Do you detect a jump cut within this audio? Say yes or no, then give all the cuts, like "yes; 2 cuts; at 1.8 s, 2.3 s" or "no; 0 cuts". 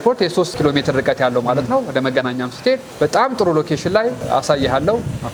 no; 0 cuts